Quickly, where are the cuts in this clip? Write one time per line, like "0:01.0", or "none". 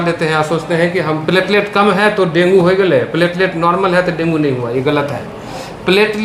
none